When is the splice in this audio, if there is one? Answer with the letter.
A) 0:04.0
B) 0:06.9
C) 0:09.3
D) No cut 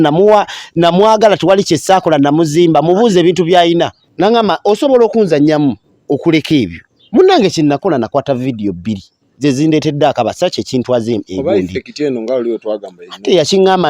A